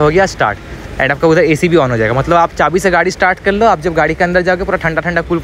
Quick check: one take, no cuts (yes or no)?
yes